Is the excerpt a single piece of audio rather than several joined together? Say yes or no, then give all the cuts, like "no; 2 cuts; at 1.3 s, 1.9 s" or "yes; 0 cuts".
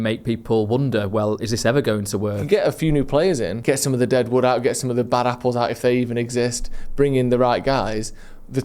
no; 2 cuts; at 2.4 s, 3.5 s